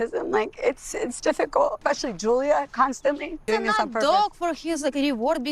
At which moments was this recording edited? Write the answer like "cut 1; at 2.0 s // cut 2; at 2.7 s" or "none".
cut 1; at 1.8 s // cut 2; at 3.5 s